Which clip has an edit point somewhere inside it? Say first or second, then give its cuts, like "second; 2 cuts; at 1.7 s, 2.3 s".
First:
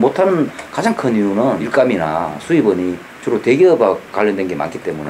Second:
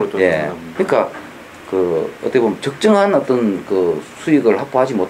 first; 1 cut; at 1.6 s